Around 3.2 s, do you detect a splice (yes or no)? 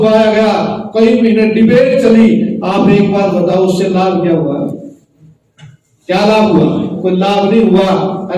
no